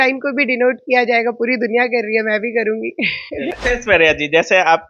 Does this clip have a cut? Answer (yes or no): yes